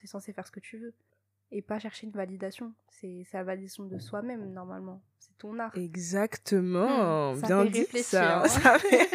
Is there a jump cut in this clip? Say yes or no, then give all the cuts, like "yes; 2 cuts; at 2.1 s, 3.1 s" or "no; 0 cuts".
no; 0 cuts